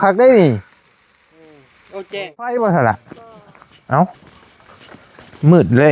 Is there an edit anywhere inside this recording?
yes; 1 cut; at 2.4 s

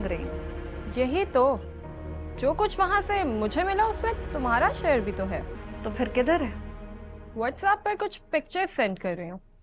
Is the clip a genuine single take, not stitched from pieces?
no; 1 cut; at 5.6 s

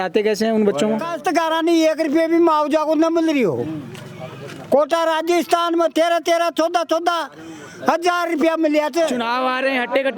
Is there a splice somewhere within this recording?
yes; 2 cuts; at 1.1 s, 9.2 s

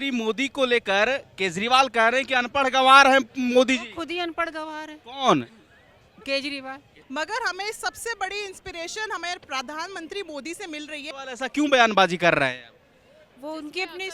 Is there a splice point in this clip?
yes; 2 cuts; at 7.0 s, 11.1 s

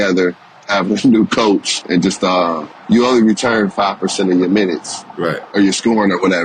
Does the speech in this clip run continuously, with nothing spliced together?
no; 1 cut; at 2.7 s

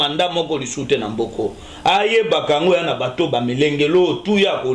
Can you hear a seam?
no; 0 cuts

